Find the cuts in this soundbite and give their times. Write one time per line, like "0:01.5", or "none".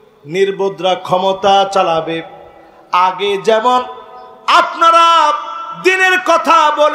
none

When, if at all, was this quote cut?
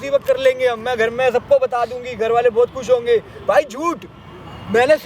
none

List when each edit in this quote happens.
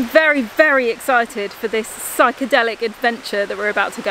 none

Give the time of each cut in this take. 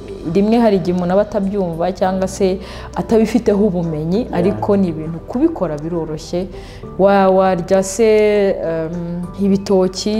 none

